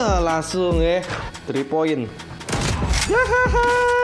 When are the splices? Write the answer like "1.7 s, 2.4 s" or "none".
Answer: 2.3 s